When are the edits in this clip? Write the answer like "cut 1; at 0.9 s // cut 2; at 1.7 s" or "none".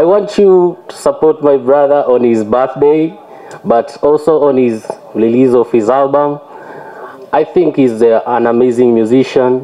none